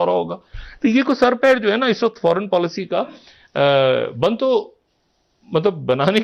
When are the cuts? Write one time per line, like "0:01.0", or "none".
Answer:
none